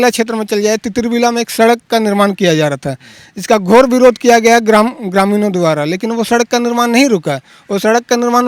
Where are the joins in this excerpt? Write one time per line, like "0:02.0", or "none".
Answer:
none